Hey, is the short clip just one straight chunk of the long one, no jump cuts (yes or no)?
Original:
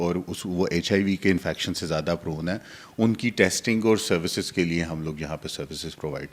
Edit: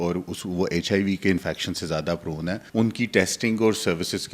no